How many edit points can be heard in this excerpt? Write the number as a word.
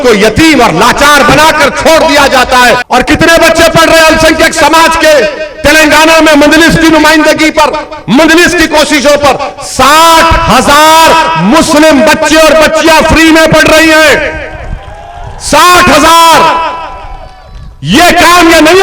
one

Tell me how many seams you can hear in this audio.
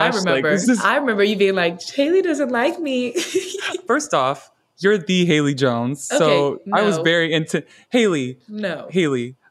one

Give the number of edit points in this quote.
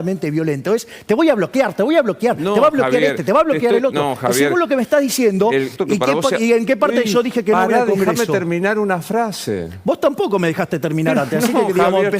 one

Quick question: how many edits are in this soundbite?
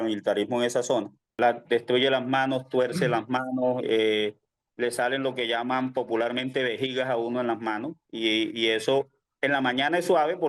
one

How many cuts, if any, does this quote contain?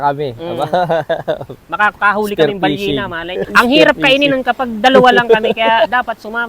one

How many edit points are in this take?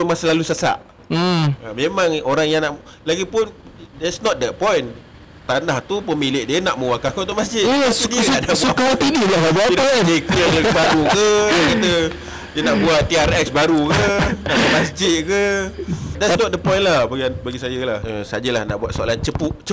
two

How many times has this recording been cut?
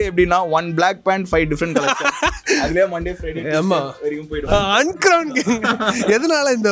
one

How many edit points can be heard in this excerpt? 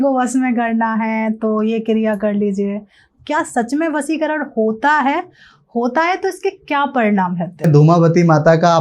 two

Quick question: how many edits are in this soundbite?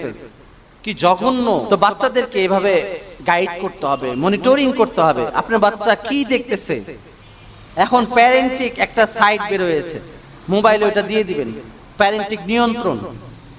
one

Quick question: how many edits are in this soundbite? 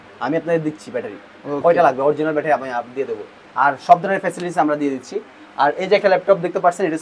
zero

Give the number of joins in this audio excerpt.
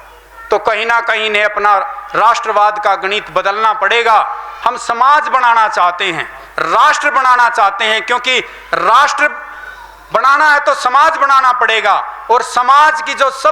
one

